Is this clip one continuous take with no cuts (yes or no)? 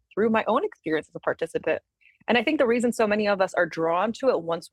yes